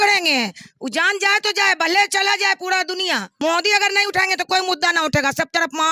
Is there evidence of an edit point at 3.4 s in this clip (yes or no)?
yes